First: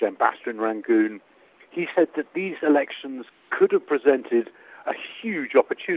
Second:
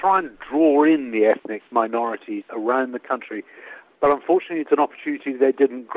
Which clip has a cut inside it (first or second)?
second